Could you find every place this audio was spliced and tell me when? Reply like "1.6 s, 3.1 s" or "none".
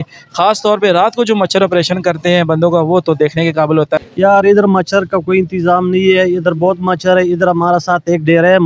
4.0 s